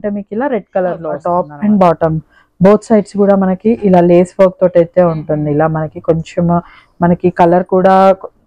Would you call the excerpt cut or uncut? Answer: cut